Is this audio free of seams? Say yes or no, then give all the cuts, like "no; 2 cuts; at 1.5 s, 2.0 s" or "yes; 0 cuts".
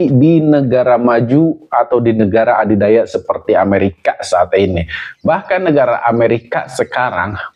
yes; 0 cuts